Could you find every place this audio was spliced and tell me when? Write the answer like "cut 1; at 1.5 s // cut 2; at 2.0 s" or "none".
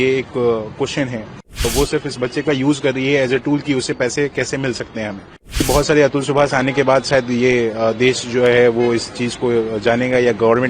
cut 1; at 1.7 s // cut 2; at 5.6 s